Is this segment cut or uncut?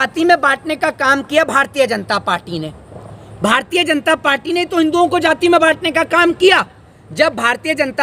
uncut